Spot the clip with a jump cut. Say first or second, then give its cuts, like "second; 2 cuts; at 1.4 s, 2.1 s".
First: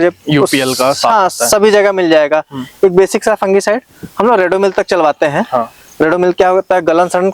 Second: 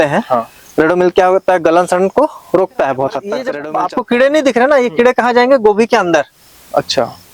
second; 1 cut; at 3.6 s